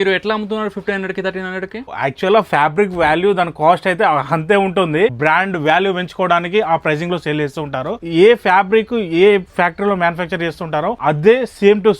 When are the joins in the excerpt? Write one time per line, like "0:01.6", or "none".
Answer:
0:01.9
0:05.2
0:08.1
0:11.0